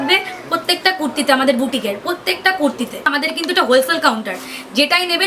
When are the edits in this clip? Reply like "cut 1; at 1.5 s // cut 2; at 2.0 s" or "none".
cut 1; at 3.0 s